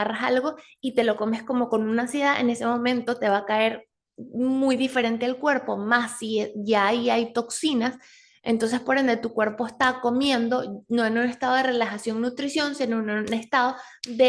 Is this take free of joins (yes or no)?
yes